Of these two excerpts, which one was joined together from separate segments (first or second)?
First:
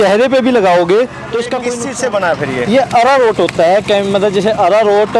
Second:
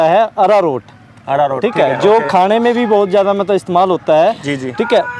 first